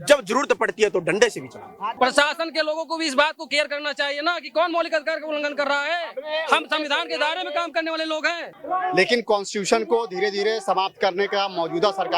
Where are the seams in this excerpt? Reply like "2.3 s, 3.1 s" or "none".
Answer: 1.9 s, 8.4 s